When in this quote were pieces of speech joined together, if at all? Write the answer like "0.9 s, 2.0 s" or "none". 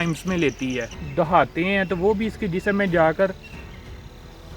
1.0 s